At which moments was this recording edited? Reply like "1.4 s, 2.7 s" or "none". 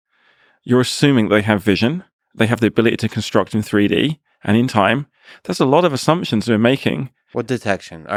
none